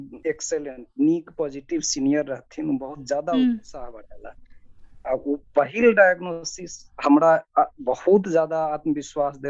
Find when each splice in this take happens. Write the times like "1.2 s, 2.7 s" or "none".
none